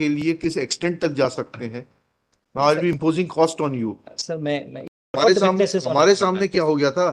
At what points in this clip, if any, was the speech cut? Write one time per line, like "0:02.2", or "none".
0:05.1